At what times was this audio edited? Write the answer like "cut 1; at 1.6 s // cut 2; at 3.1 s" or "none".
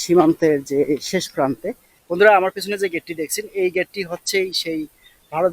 cut 1; at 1.9 s